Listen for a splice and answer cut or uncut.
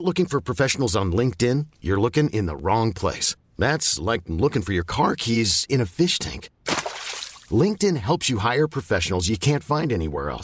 uncut